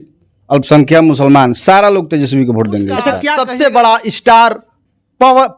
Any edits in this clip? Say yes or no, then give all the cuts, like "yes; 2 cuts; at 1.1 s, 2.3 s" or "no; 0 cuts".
yes; 1 cut; at 3.3 s